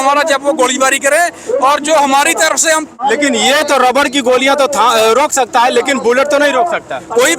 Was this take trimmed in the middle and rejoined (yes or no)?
yes